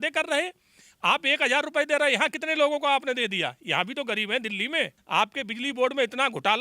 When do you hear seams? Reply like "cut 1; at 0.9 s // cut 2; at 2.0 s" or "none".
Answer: cut 1; at 5.0 s